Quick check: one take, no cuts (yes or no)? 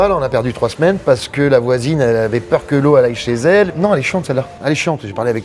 no